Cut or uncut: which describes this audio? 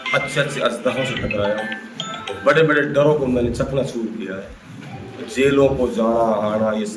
uncut